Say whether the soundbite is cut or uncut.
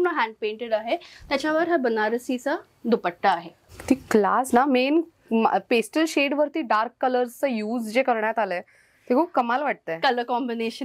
cut